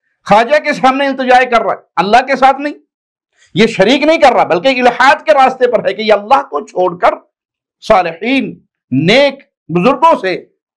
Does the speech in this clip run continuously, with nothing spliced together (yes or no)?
yes